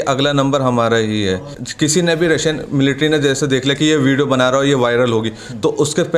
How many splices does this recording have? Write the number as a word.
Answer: one